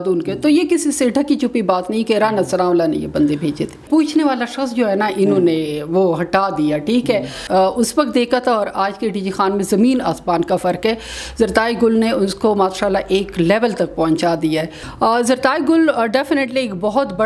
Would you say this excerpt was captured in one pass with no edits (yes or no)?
no